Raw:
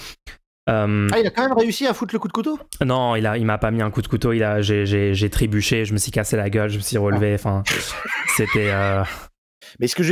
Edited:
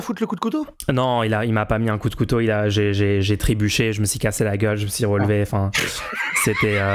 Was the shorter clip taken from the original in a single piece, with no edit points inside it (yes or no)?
yes